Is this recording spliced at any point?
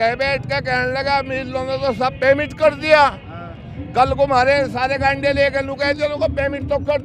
no; 0 cuts

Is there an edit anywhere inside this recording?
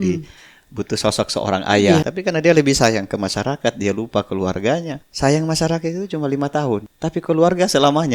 yes; 3 cuts; at 2.1 s, 5.0 s, 6.9 s

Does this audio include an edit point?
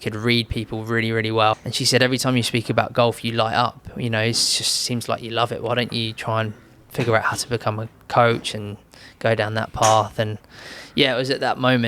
yes; 1 cut; at 1.5 s

